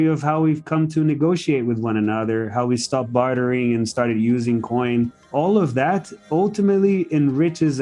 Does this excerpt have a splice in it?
yes; 1 cut; at 5.2 s

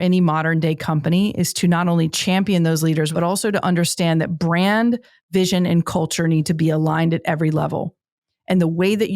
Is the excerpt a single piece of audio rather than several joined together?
no; 1 cut; at 3.1 s

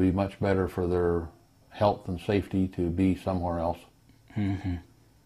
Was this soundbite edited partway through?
no; 0 cuts

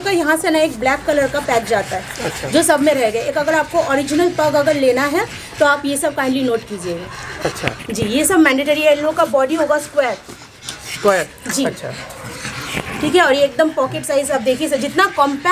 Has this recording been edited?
no; 0 cuts

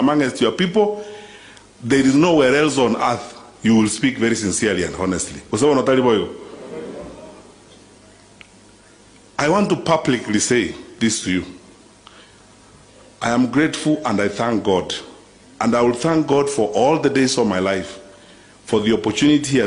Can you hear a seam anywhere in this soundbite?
no; 0 cuts

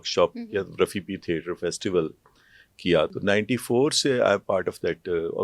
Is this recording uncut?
no; 1 cut; at 3.1 s

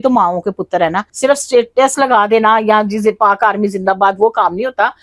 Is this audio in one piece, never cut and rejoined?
no; 1 cut; at 1.1 s

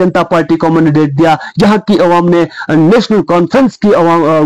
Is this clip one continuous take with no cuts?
yes; 0 cuts

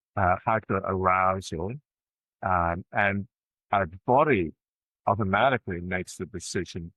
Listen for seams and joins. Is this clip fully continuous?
yes; 0 cuts

